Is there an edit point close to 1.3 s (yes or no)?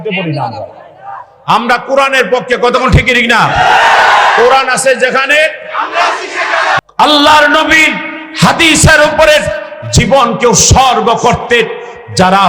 no